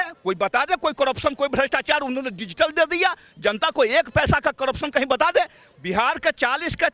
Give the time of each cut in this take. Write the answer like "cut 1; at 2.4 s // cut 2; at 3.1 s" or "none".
cut 1; at 5.7 s